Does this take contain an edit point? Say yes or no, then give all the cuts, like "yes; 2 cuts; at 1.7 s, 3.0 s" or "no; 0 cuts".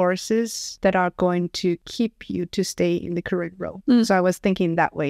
no; 0 cuts